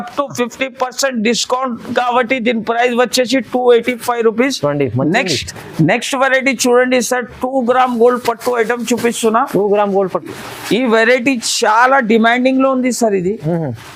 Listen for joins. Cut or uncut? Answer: uncut